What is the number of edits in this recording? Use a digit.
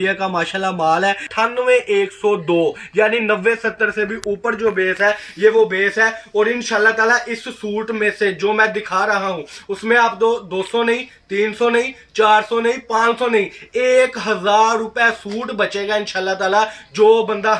1